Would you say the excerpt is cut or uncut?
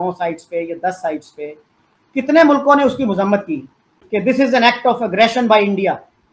uncut